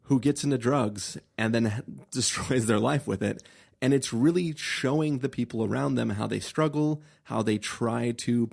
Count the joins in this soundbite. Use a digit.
0